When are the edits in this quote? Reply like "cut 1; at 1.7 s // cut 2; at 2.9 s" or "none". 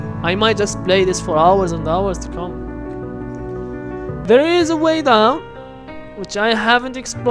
cut 1; at 4.2 s